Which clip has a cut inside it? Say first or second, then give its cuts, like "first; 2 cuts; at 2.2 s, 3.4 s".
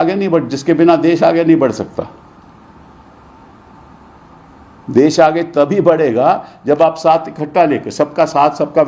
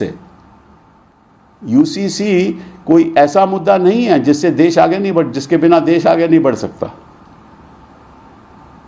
second; 1 cut; at 1.0 s